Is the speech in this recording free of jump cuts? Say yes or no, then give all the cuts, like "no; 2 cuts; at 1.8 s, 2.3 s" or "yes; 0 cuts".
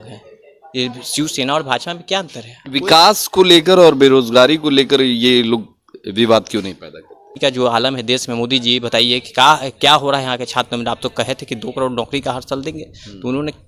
no; 1 cut; at 7.3 s